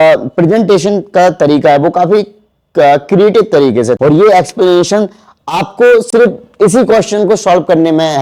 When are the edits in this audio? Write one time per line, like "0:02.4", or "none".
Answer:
0:04.0